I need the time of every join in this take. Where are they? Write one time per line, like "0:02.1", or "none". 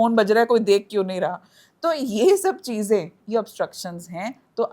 none